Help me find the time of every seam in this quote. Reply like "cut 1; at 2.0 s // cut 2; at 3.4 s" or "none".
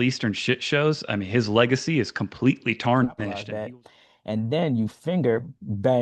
cut 1; at 3.4 s